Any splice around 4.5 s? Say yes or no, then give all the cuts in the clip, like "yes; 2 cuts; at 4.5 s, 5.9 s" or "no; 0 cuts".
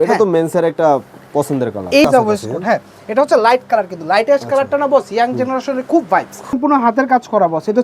no; 2 cuts; at 2.0 s, 6.5 s